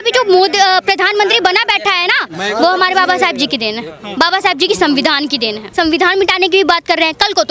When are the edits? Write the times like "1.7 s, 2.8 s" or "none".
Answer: 5.6 s